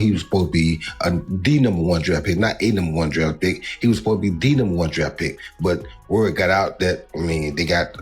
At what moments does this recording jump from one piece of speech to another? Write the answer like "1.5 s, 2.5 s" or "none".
7.1 s

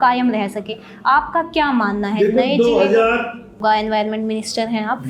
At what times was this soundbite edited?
3.6 s

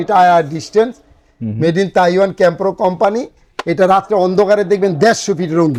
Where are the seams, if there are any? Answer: none

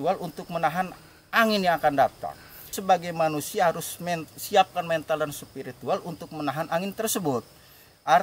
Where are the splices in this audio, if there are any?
none

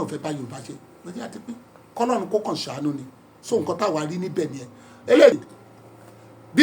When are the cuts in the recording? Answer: 5.4 s

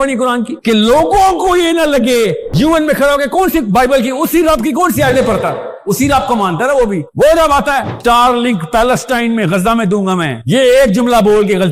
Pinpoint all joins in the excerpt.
2.4 s, 7.9 s

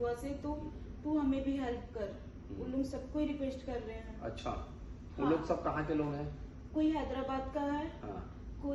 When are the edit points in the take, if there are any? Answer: none

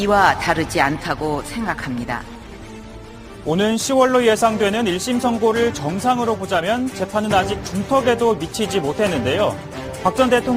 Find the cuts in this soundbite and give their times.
2.7 s

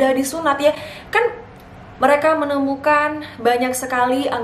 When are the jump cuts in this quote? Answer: 1.9 s

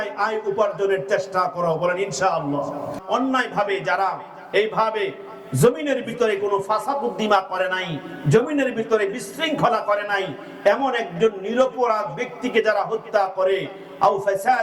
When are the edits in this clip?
3.0 s

